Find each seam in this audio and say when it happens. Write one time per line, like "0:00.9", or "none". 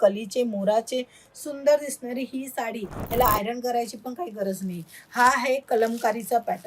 0:02.9